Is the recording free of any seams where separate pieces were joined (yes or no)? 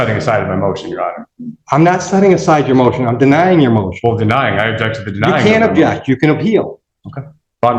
yes